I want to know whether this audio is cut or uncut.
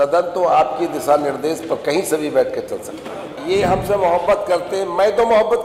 cut